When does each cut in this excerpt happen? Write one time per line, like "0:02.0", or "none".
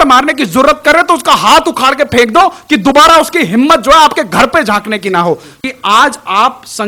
0:05.6